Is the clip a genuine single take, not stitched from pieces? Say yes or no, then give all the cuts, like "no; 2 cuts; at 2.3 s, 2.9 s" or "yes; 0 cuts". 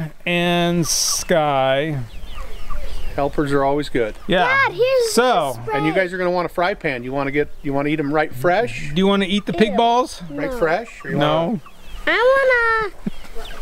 yes; 0 cuts